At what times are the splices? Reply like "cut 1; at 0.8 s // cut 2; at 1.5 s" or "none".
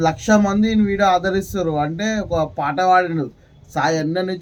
none

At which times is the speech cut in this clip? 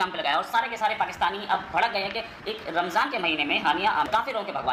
none

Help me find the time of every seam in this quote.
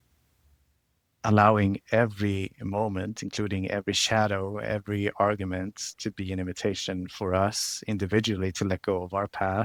none

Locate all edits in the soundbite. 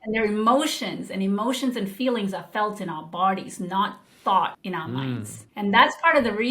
cut 1; at 4.6 s

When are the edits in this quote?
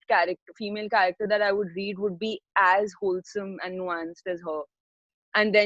none

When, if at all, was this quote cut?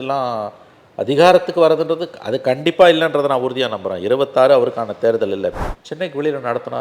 cut 1; at 5.6 s

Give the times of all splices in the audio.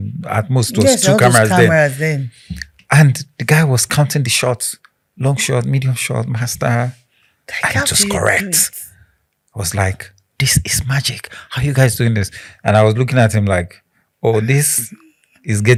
none

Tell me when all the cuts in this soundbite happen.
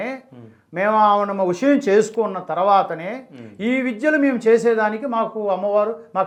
none

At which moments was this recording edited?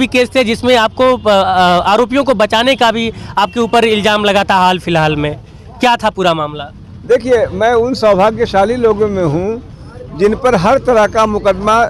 none

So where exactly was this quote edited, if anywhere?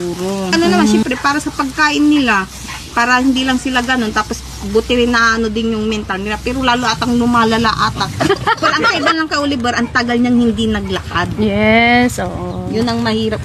cut 1; at 1.0 s // cut 2; at 8.8 s

